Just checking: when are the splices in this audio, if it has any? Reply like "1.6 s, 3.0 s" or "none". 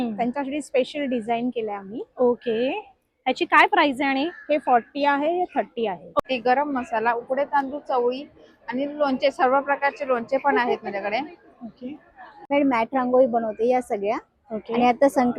6.2 s, 12.5 s

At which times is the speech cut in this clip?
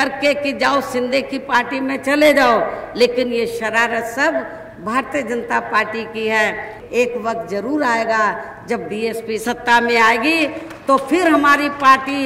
9.4 s

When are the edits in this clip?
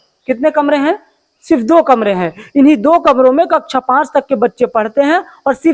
none

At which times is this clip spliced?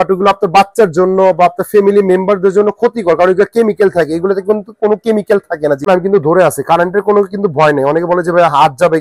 5.9 s

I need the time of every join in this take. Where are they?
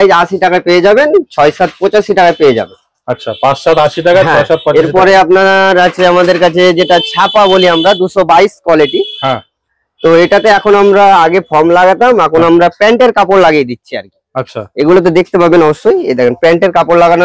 none

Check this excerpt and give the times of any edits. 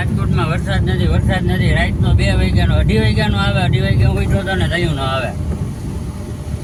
none

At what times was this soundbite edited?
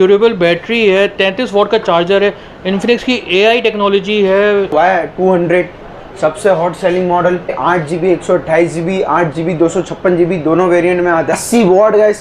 4.7 s, 7.6 s, 11.3 s

